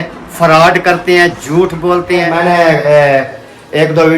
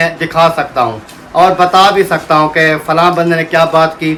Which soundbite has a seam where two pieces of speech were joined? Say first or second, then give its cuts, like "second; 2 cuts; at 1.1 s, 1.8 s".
first; 1 cut; at 2.3 s